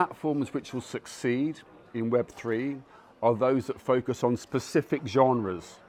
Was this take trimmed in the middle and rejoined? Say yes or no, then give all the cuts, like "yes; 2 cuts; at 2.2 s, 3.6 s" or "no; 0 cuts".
no; 0 cuts